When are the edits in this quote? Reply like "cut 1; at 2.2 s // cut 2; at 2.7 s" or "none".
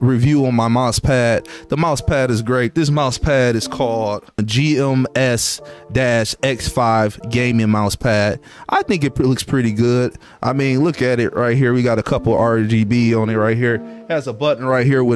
none